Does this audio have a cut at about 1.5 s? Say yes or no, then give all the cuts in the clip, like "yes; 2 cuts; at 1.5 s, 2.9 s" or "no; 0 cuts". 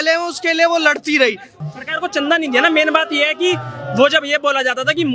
yes; 1 cut; at 1.5 s